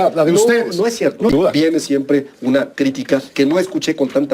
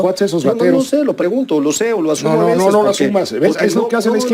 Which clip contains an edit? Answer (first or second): first